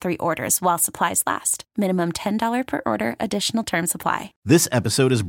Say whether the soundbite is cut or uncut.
cut